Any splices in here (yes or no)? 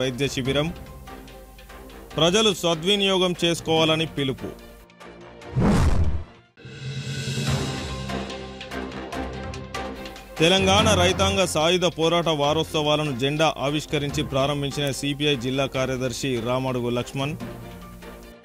no